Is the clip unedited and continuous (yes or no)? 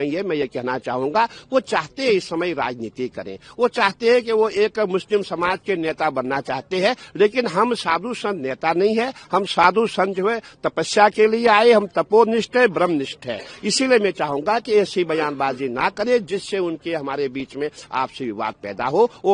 yes